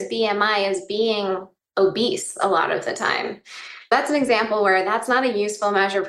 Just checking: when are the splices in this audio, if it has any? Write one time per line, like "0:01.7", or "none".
0:03.9